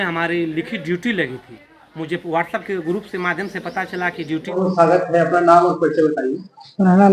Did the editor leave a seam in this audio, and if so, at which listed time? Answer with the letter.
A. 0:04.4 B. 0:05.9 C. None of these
A